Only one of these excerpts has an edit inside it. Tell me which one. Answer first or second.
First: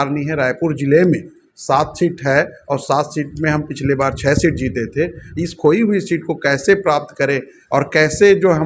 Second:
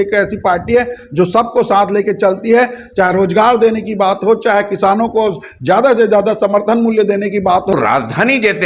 second